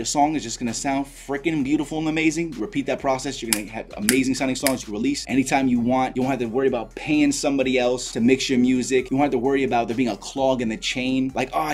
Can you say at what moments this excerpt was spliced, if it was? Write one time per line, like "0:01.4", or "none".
none